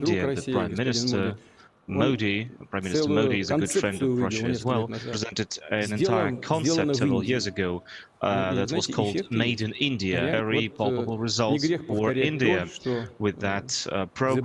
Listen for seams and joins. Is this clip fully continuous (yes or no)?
no